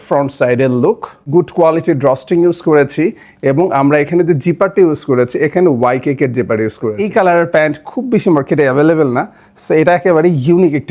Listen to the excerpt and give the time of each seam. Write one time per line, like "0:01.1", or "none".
0:01.3
0:07.0

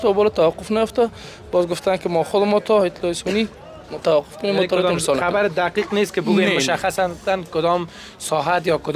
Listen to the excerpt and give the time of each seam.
none

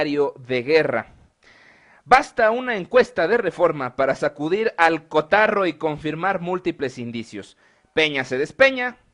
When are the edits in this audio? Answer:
0:06.5

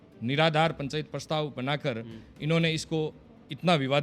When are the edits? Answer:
none

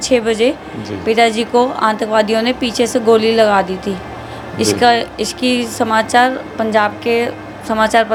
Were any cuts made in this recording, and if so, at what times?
none

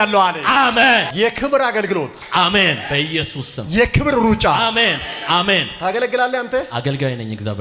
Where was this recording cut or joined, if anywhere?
0:01.1

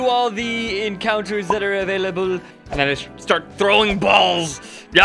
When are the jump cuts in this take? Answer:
0:02.5

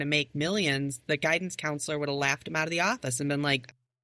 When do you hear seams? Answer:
none

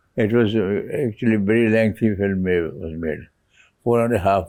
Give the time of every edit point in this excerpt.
none

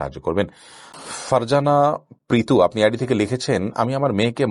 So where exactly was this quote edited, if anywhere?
0:01.0

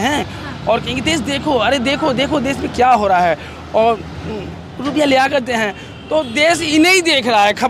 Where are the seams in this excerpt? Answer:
none

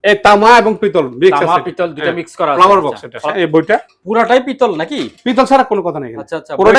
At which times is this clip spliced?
0:03.2

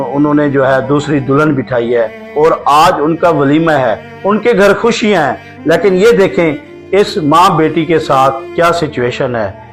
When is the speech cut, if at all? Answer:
none

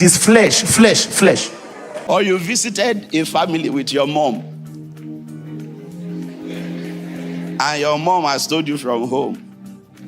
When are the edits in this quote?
0:01.9

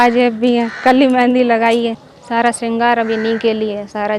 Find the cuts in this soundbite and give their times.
0:02.1

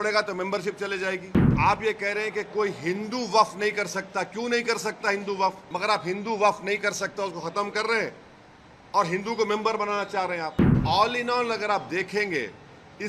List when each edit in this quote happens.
0:01.5
0:05.7
0:10.8

